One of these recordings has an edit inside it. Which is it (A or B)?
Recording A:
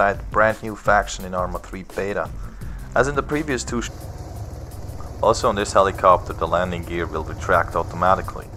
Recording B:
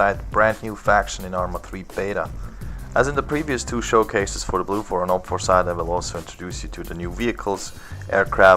B